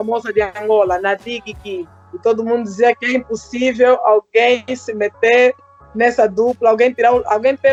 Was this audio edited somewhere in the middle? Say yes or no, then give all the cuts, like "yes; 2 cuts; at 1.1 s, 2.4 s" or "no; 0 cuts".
no; 0 cuts